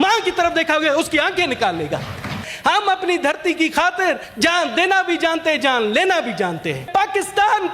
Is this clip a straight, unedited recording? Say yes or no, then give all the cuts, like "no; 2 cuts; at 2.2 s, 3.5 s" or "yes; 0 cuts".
no; 3 cuts; at 2.4 s, 4.3 s, 6.9 s